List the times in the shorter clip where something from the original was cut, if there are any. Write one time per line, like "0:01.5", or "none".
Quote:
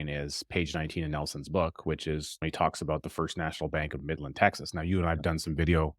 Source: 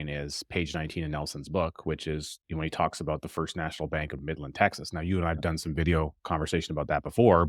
0:02.3

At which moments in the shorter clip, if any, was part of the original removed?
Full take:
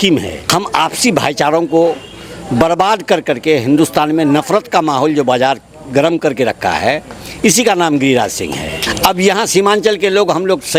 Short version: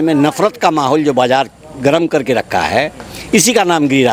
none

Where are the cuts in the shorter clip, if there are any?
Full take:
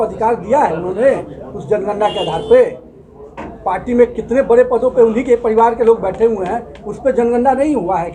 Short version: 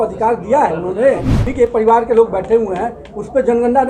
0:01.5

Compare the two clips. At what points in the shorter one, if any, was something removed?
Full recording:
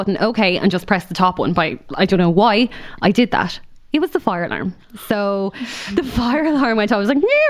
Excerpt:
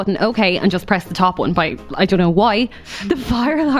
0:02.8

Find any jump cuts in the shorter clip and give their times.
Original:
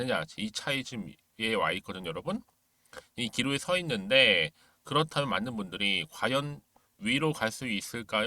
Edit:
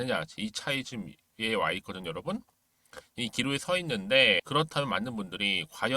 0:04.4

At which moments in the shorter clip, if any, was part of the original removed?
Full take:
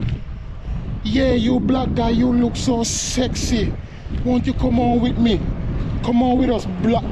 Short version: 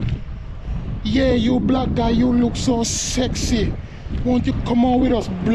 0:04.5

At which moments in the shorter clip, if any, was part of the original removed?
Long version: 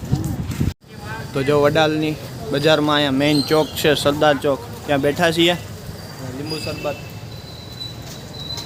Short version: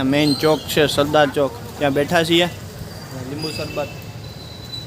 none

